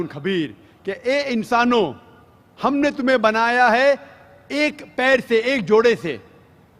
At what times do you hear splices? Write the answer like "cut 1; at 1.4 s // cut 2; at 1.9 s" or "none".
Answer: cut 1; at 1.4 s